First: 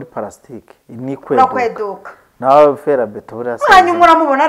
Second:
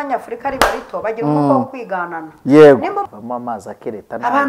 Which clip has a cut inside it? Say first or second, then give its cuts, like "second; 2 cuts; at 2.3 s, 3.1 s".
second; 1 cut; at 3.1 s